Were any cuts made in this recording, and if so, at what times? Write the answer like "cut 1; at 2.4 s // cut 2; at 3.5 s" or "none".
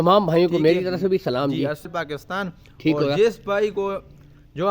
cut 1; at 1.9 s